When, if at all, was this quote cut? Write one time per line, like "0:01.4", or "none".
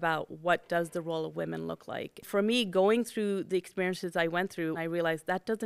0:02.2
0:04.8